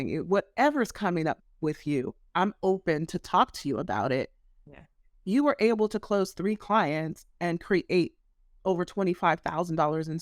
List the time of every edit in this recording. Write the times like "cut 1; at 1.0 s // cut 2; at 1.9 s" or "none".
cut 1; at 2.2 s